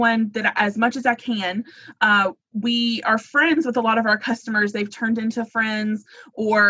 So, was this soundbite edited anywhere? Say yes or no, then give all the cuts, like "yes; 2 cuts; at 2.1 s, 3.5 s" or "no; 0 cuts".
no; 0 cuts